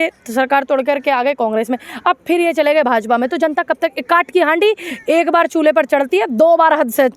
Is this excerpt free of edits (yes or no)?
yes